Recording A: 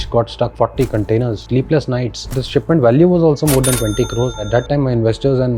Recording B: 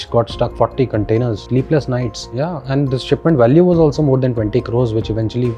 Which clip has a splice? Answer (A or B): A